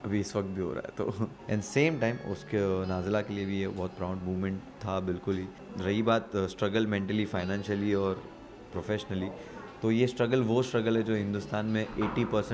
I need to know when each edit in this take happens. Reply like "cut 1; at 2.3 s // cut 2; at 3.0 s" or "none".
cut 1; at 1.4 s // cut 2; at 5.6 s